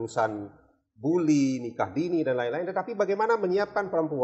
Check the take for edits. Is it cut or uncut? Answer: uncut